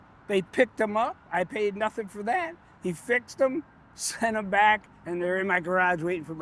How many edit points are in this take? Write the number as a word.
zero